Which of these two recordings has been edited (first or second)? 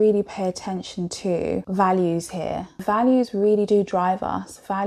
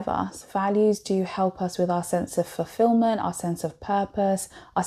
first